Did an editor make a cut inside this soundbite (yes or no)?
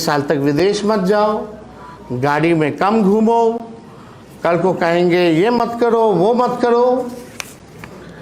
no